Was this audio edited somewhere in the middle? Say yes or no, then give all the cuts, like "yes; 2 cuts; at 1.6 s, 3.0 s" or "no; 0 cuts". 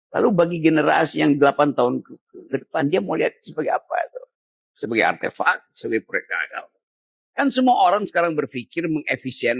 no; 0 cuts